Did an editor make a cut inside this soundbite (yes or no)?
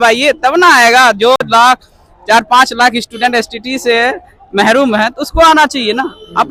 no